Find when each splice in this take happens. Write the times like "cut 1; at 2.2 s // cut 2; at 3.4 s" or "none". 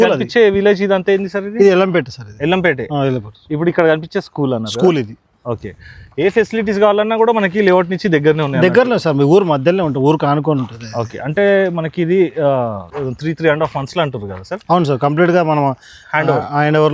none